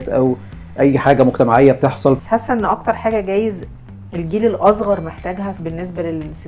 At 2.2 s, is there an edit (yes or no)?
yes